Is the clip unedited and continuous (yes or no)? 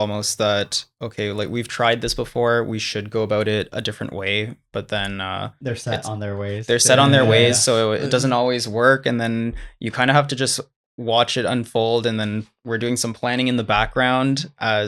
yes